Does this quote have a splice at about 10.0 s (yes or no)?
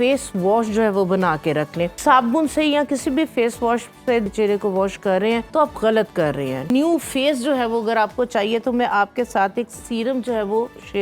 no